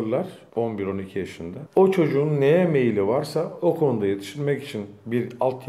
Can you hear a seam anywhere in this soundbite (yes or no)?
yes